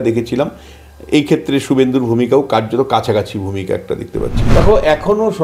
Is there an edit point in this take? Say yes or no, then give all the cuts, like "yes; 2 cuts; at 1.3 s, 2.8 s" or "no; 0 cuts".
yes; 1 cut; at 4.4 s